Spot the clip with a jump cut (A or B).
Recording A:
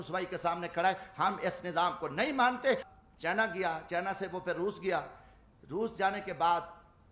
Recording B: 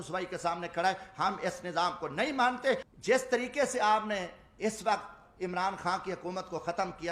A